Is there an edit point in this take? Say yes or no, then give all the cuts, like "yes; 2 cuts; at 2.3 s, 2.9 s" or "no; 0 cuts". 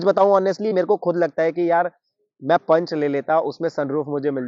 no; 0 cuts